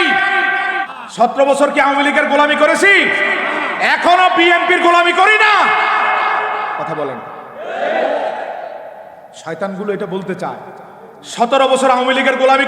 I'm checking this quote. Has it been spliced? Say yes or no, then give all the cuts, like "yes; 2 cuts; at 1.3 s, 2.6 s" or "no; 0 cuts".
yes; 1 cut; at 1.1 s